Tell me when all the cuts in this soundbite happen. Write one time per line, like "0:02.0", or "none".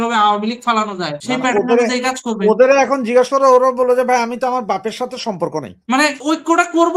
0:05.8